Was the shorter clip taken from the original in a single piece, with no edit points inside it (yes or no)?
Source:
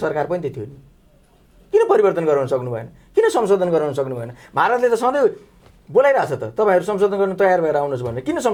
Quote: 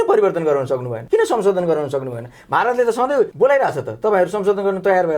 no